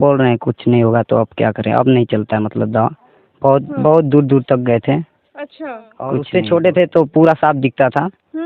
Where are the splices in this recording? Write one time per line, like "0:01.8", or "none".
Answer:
0:06.2